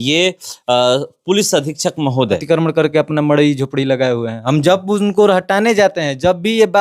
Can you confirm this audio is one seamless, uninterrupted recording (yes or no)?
no